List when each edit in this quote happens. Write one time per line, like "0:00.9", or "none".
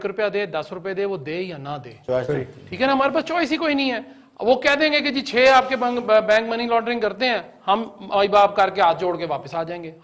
none

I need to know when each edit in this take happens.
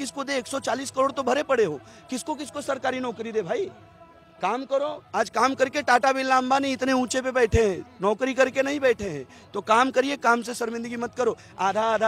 none

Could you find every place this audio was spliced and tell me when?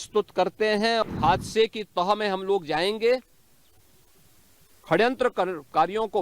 0:01.0

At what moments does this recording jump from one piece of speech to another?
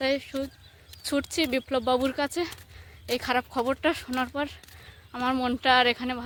none

